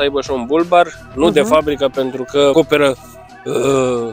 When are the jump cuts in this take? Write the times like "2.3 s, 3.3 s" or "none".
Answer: 2.5 s